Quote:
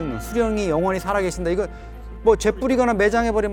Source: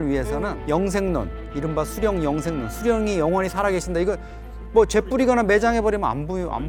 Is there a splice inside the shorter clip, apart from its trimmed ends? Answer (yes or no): no